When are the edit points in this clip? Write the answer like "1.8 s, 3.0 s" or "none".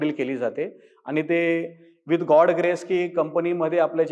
none